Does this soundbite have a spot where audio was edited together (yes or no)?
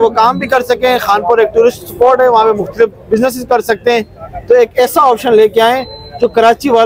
no